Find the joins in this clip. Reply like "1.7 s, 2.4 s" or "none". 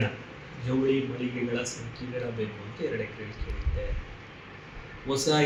none